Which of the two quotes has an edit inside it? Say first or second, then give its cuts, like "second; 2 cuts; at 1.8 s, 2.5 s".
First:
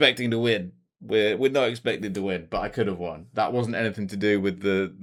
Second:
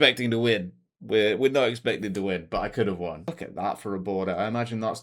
second; 1 cut; at 3.2 s